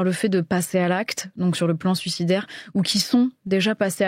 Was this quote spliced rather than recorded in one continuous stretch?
no; 0 cuts

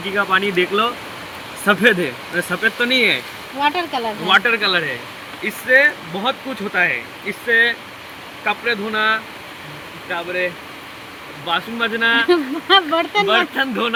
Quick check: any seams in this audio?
no; 0 cuts

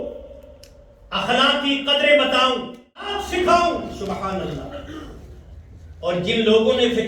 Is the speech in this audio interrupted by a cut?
yes; 1 cut; at 3.2 s

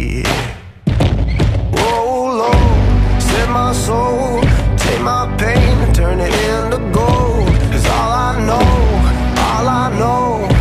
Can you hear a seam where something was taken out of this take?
yes; 1 cut; at 1.6 s

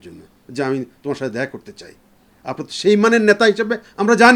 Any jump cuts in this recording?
no; 0 cuts

